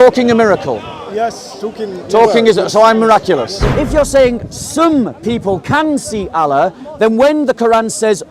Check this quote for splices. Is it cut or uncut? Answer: cut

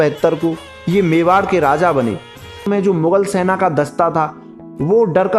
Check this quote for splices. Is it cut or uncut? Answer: cut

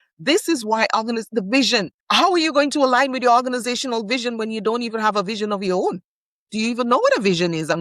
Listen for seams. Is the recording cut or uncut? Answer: cut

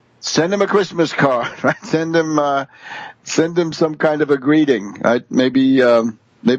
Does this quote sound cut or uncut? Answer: uncut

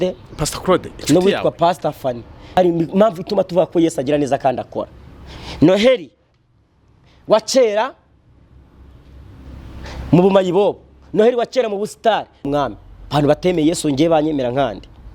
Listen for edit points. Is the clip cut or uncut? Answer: cut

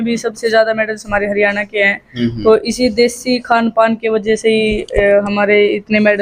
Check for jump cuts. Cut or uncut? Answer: uncut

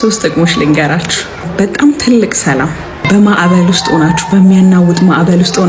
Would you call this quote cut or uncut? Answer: cut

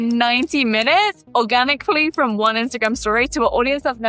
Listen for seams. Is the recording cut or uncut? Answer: uncut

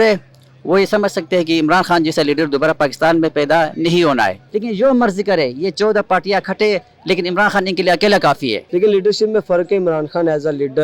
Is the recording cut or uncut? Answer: cut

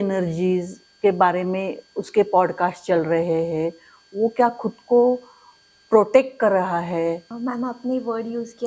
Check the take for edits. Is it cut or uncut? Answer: uncut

